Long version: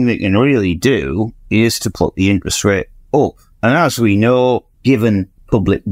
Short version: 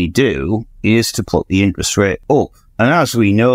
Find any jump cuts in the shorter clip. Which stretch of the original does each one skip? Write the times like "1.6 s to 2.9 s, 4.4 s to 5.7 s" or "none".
2.9 s to 3.0 s